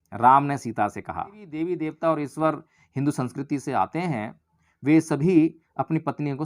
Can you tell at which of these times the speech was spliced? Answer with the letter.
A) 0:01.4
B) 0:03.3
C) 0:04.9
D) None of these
A